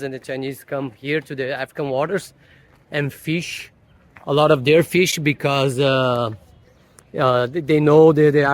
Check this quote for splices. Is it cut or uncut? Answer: uncut